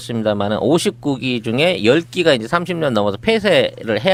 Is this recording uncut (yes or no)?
yes